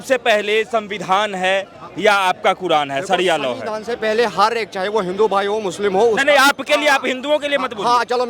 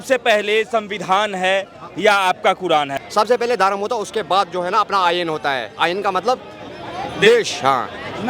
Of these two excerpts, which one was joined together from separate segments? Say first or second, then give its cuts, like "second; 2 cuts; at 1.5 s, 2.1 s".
second; 1 cut; at 3.0 s